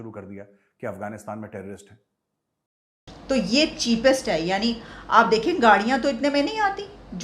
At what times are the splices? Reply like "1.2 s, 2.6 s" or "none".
3.1 s